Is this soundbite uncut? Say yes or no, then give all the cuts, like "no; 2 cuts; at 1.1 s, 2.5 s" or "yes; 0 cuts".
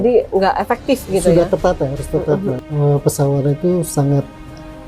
no; 1 cut; at 2.6 s